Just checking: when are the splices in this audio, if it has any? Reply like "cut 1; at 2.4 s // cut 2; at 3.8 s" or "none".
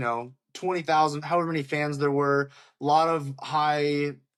none